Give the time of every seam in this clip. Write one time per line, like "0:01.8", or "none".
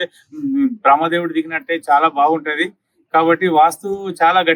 none